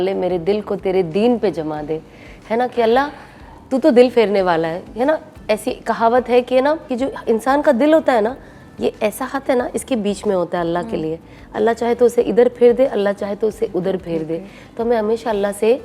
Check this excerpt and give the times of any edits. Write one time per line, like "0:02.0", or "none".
none

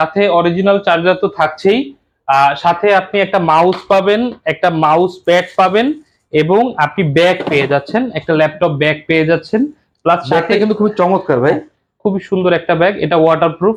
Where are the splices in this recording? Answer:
none

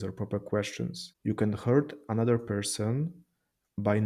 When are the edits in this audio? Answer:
0:01.1

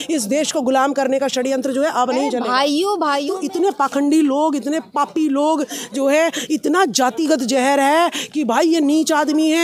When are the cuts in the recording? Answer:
0:03.3

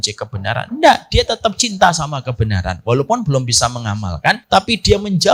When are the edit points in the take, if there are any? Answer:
0:04.4

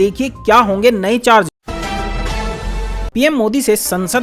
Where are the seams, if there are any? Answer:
0:01.6
0:03.1

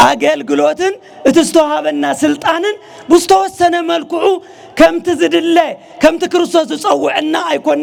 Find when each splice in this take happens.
none

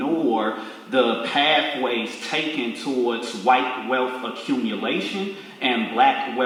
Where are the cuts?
none

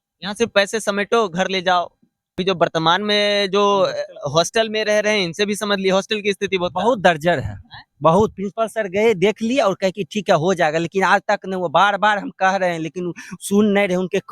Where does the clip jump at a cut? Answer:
0:02.4

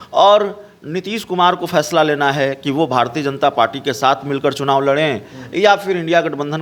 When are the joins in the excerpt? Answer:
none

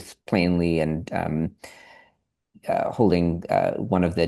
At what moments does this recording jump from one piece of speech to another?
none

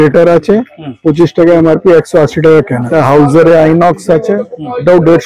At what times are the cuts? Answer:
0:02.8

